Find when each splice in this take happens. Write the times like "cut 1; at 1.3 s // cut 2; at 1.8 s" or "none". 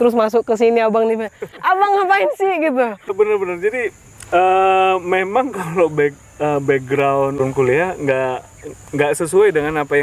cut 1; at 1.7 s // cut 2; at 3.1 s // cut 3; at 7.4 s